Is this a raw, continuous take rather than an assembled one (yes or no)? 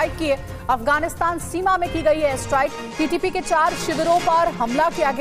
yes